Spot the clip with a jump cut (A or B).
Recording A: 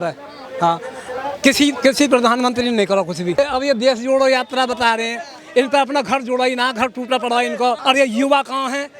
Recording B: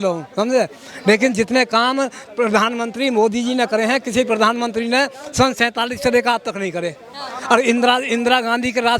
A